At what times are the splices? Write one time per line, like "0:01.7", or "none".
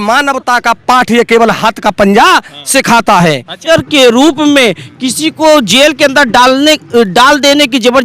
0:03.6